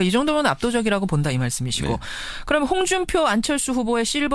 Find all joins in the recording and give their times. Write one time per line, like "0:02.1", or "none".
0:01.6